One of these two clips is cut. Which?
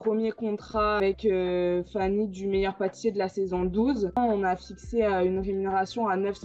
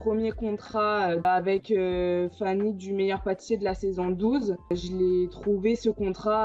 first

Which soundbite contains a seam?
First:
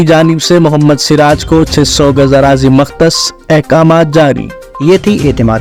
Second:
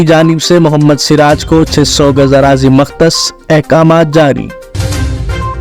second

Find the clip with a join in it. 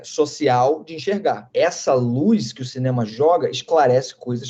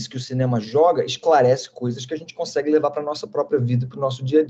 first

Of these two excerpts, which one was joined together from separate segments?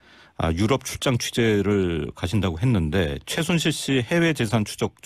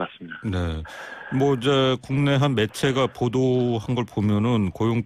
first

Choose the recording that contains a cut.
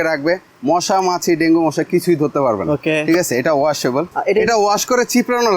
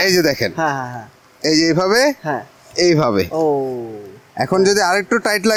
first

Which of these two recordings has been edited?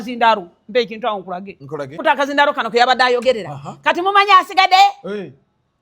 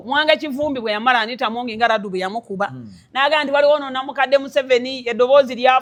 first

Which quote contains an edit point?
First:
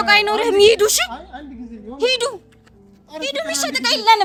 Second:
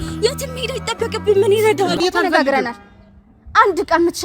second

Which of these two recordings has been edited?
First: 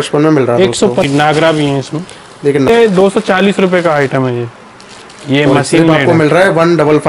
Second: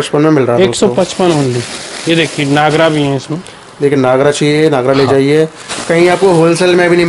first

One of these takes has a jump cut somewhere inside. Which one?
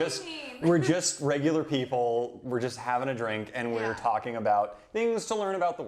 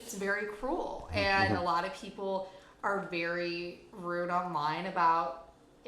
second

